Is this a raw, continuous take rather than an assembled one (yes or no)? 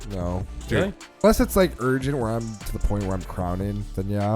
no